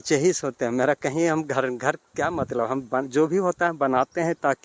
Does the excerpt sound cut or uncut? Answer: uncut